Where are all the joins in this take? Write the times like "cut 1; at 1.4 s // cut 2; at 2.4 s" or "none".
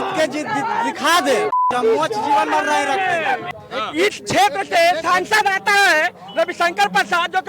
cut 1; at 3.6 s